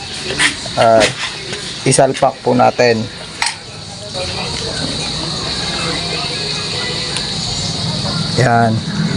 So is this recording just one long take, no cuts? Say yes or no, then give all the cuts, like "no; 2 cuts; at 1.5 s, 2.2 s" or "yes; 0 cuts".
no; 1 cut; at 4.1 s